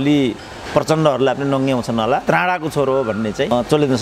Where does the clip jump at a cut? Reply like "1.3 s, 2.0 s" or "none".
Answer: 2.2 s